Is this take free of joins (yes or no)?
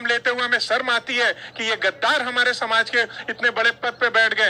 yes